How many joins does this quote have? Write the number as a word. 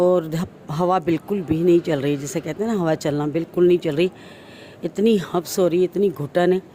zero